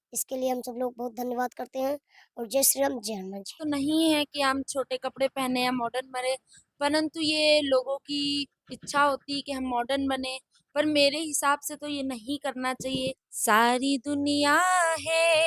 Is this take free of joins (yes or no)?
no